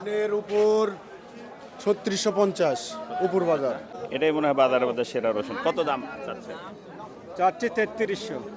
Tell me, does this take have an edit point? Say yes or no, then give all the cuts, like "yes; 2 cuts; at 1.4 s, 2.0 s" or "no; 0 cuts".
yes; 1 cut; at 3.9 s